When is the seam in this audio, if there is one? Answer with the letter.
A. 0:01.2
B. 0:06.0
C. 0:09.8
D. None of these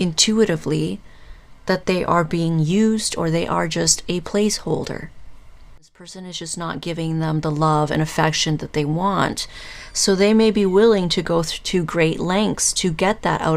B